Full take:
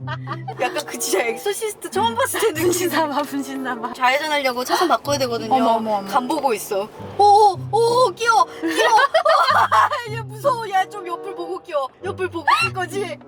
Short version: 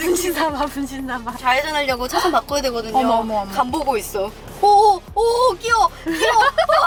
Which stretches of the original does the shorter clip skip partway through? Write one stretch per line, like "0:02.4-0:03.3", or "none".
none